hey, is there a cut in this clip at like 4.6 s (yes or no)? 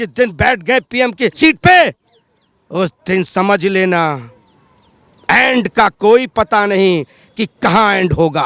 no